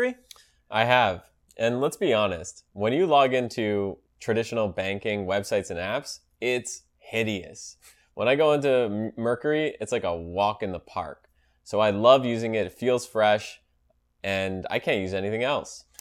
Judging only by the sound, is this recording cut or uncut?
uncut